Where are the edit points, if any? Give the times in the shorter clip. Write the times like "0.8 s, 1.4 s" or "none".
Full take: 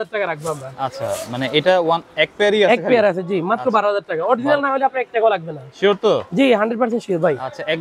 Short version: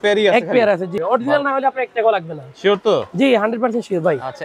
0.9 s